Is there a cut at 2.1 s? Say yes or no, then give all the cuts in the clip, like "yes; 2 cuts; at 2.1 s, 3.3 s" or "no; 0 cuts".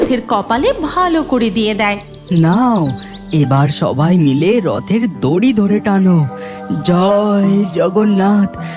yes; 1 cut; at 2.1 s